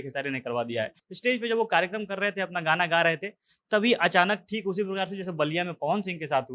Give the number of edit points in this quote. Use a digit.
1